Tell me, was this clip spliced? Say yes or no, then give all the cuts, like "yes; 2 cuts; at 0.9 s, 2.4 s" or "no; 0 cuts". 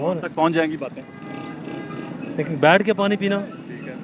no; 0 cuts